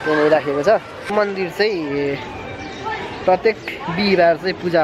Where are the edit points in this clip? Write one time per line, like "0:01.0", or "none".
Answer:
0:01.0